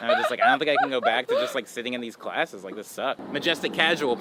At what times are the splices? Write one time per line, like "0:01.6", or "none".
0:03.2